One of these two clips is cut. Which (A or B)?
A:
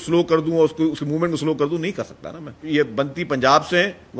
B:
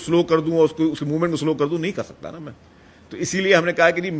A